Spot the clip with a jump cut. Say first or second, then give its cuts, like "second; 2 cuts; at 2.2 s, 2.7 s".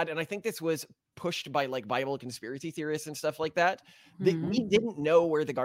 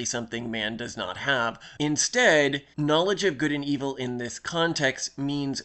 second; 2 cuts; at 1.6 s, 2.7 s